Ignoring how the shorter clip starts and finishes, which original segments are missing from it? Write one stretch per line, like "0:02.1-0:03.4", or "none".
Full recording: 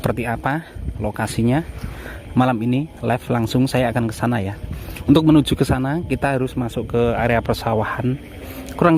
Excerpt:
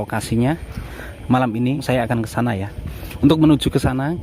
0:02.9-0:03.7